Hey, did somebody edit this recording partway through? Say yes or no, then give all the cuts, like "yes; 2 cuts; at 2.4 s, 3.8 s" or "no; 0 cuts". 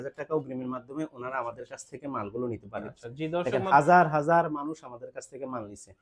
yes; 1 cut; at 3.4 s